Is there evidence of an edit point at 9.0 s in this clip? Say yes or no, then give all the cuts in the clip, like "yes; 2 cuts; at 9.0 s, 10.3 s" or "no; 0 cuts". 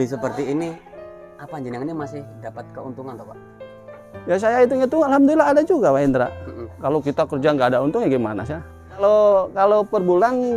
yes; 1 cut; at 9.0 s